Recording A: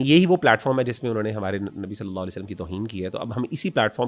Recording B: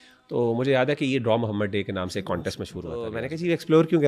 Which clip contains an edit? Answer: B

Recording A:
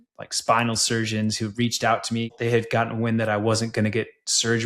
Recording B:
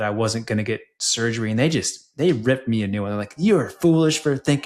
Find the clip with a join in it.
A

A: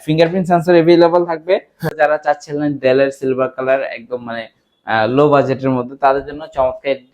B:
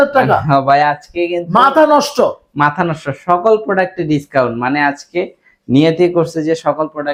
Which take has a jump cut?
A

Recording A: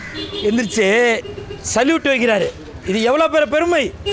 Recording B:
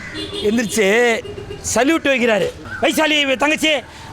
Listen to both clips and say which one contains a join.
B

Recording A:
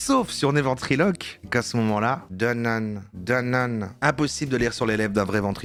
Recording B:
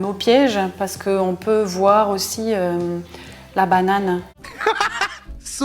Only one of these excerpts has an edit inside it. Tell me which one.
B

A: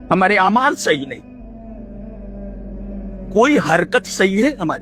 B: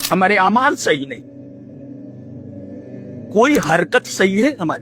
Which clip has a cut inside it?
B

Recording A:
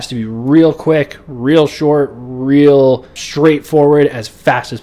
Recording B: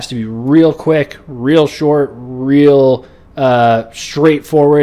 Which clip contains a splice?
A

